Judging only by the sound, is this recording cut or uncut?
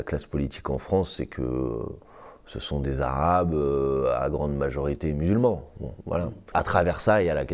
cut